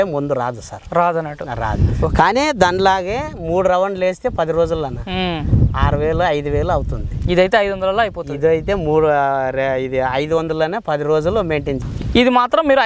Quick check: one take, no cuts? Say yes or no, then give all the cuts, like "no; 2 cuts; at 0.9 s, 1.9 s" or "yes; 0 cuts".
yes; 0 cuts